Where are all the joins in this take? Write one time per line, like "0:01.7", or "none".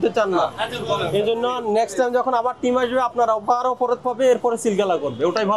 none